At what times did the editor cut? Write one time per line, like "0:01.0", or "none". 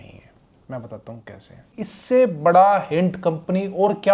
0:01.8